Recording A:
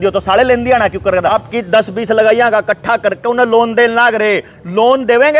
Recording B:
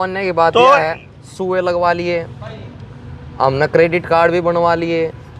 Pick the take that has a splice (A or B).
A